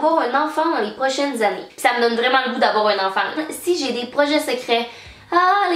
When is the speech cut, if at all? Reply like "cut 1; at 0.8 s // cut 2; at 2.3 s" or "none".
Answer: cut 1; at 1.7 s // cut 2; at 3.4 s